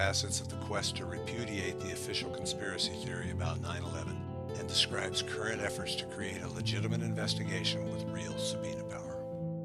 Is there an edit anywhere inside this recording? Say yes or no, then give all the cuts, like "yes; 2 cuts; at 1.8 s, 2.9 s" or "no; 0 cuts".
no; 0 cuts